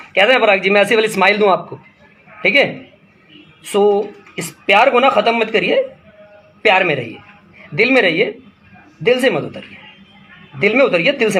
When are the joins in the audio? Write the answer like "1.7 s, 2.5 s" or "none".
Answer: none